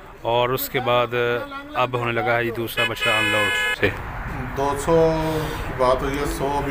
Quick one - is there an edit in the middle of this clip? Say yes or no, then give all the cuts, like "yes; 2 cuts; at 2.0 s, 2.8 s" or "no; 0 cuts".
yes; 1 cut; at 3.8 s